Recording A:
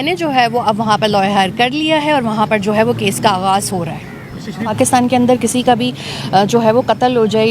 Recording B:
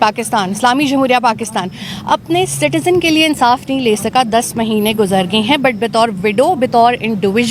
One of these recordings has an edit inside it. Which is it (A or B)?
A